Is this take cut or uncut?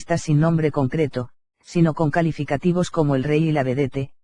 cut